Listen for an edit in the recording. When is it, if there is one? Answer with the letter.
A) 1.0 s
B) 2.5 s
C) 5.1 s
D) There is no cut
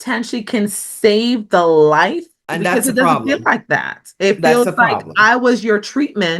B